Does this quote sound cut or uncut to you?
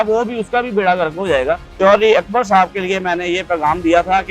cut